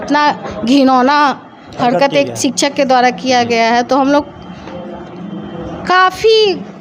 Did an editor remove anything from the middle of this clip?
no; 0 cuts

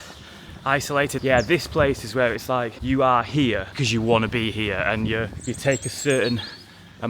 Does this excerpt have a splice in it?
yes; 4 cuts; at 1.1 s, 2.7 s, 3.7 s, 5.4 s

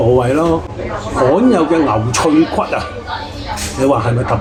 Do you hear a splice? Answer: no; 0 cuts

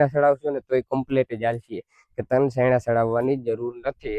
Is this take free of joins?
yes; 0 cuts

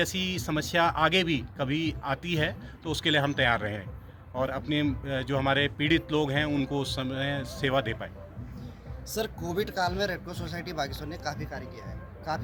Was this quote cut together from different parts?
no; 0 cuts

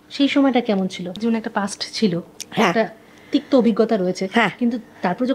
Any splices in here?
yes; 1 cut; at 1.2 s

